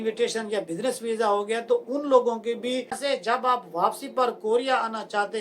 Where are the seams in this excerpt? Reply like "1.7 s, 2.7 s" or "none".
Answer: 3.0 s

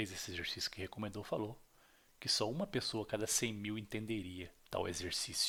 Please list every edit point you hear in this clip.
none

